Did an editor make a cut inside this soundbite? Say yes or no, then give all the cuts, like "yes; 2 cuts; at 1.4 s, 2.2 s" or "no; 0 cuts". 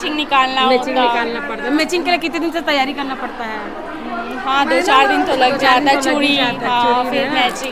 no; 0 cuts